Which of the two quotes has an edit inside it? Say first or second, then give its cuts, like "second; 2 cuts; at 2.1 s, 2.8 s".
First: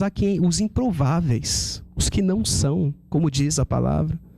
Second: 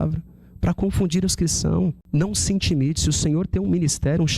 second; 1 cut; at 2.0 s